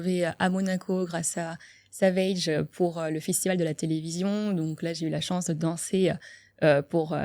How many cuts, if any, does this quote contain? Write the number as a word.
zero